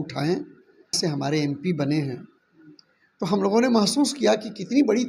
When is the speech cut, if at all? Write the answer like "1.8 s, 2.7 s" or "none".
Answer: 1.0 s